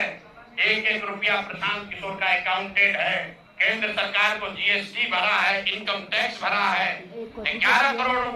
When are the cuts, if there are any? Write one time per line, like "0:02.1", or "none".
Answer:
0:07.1